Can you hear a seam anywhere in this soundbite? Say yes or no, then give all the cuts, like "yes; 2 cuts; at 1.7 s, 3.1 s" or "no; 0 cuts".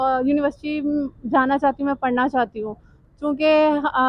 no; 0 cuts